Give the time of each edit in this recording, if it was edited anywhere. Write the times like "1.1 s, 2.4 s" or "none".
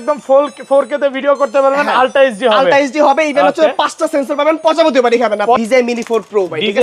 5.6 s